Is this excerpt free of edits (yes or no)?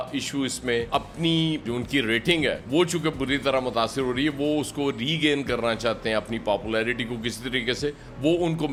yes